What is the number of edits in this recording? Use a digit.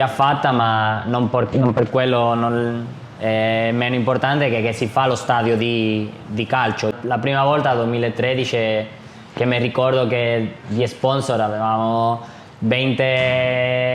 1